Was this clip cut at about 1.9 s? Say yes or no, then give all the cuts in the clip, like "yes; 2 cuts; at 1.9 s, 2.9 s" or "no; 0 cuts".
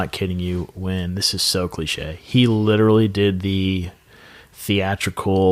no; 0 cuts